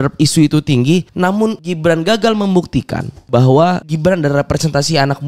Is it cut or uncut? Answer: cut